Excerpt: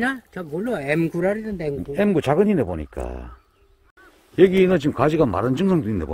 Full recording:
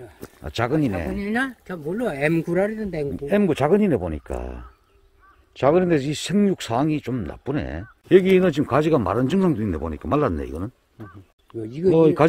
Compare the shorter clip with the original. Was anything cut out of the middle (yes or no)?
yes